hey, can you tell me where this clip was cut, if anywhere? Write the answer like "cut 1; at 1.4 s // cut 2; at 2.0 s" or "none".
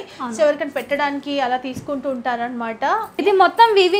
cut 1; at 3.1 s